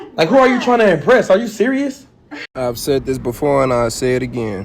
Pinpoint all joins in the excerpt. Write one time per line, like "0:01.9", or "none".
0:02.4